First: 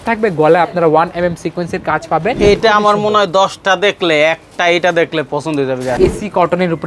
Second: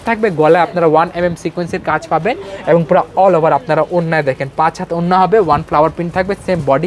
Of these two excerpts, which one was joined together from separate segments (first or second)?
first